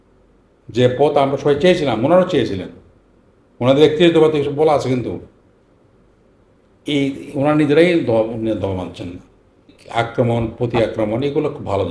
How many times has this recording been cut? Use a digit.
1